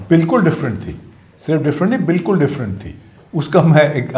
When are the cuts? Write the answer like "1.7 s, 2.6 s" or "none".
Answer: none